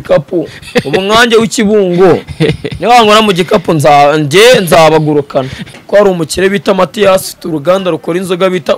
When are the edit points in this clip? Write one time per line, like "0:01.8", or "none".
0:05.7